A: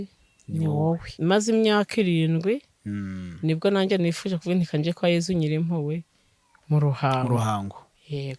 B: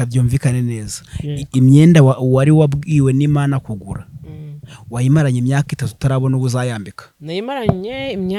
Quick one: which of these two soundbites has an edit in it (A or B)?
A